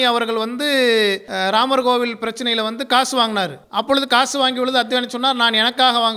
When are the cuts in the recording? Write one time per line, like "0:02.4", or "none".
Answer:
0:01.3
0:03.6